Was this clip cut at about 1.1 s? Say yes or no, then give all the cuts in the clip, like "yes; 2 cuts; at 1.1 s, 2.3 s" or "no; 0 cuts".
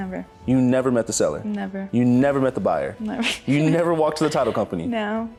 no; 0 cuts